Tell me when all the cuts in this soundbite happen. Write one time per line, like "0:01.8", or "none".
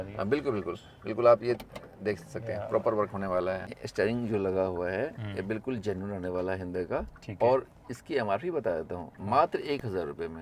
0:03.7